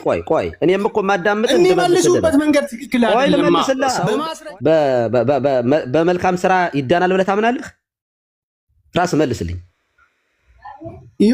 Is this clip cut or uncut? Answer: cut